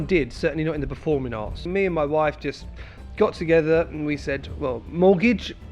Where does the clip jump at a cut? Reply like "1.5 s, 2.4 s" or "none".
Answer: 1.7 s